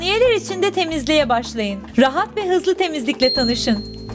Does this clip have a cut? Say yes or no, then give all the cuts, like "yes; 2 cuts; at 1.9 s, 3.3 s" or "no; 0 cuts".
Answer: no; 0 cuts